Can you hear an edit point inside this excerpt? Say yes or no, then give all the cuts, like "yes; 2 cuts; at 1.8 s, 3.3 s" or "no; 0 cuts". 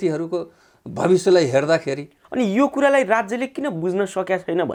no; 0 cuts